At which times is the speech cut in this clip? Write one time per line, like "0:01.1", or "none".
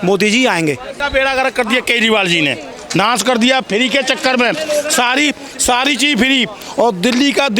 0:01.0